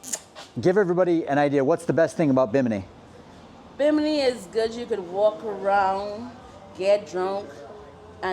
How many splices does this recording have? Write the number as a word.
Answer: zero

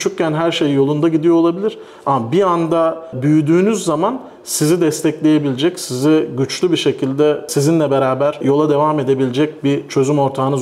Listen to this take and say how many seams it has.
three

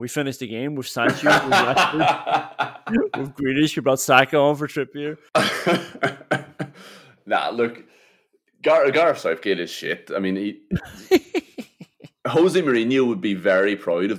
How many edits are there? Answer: one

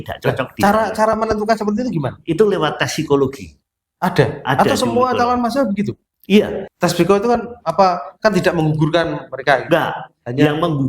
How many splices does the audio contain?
one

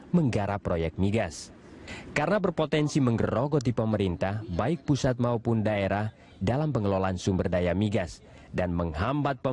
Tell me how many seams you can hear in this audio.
zero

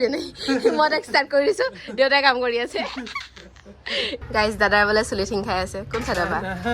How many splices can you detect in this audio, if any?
one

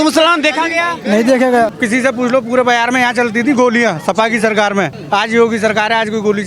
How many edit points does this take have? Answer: two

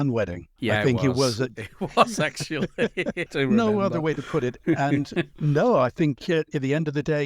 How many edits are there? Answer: two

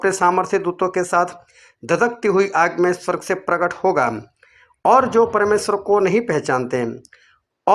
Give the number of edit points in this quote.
one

